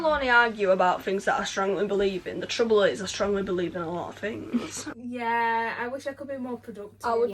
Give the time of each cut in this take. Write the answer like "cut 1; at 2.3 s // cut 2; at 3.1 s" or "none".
cut 1; at 4.9 s